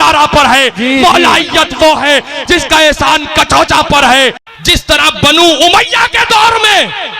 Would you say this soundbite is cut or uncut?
cut